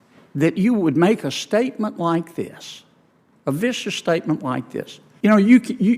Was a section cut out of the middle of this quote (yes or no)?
yes